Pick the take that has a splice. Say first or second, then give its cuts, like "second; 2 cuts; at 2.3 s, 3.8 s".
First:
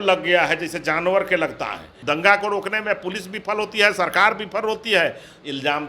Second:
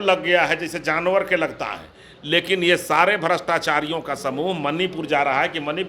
first; 1 cut; at 1.9 s